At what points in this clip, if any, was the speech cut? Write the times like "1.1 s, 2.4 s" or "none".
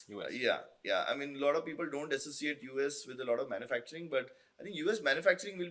none